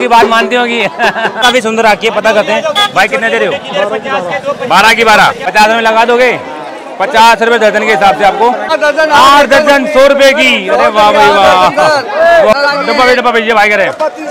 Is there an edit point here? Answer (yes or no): yes